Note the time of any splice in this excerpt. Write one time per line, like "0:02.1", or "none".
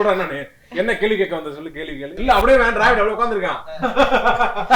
0:02.2